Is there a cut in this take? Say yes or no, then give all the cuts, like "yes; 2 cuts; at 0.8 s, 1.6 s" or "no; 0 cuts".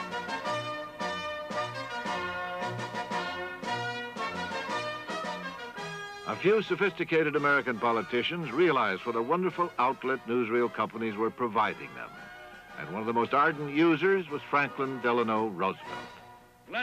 yes; 1 cut; at 13.4 s